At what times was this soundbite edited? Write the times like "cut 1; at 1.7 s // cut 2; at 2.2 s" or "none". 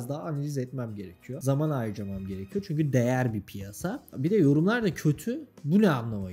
cut 1; at 4.1 s